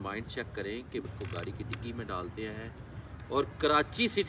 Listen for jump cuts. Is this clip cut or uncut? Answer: cut